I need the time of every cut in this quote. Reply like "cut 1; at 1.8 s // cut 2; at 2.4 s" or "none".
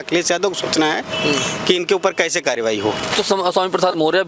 cut 1; at 3.1 s